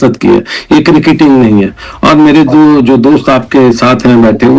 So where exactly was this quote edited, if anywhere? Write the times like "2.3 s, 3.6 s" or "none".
none